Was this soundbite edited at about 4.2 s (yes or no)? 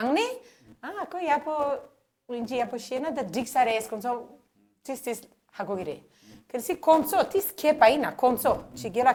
no